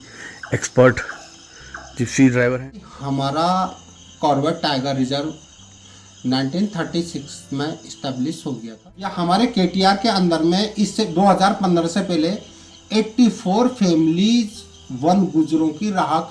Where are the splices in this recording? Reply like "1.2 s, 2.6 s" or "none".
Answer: 2.8 s, 9.0 s

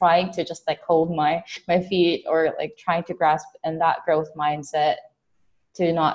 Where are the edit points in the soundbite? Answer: 1.5 s

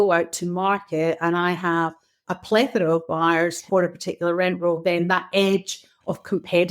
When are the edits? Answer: 2.2 s, 3.6 s

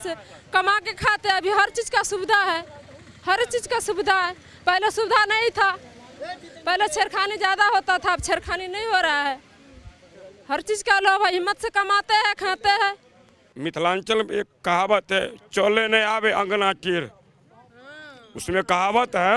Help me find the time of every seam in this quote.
none

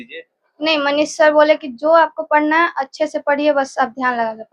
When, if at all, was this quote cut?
none

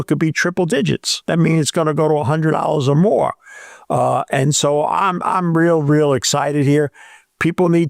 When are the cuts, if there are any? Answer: 1.1 s

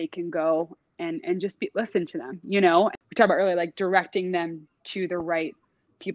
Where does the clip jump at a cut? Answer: 2.9 s

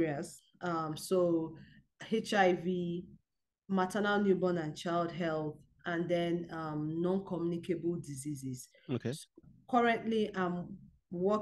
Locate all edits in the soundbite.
9.5 s

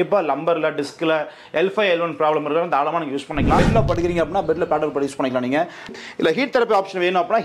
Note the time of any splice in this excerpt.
3.6 s, 5.9 s

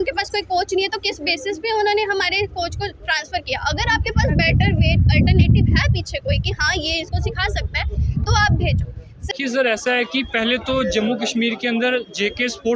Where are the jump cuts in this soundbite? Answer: 9.3 s

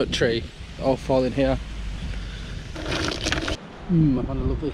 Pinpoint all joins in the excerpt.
3.6 s

